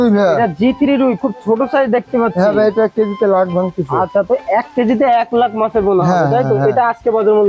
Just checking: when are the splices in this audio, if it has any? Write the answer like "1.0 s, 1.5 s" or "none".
none